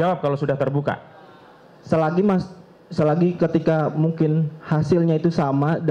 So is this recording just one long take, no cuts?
yes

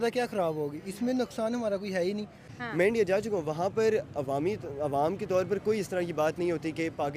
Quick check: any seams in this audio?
yes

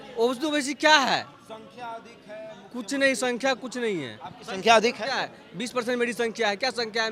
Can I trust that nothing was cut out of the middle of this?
yes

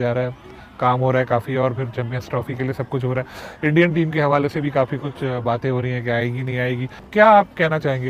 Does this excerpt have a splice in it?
yes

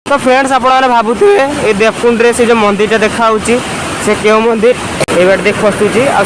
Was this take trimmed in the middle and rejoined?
yes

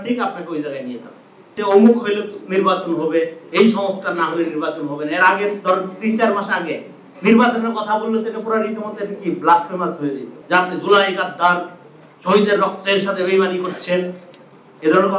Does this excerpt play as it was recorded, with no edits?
no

